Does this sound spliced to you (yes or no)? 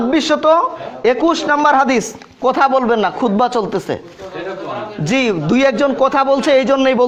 no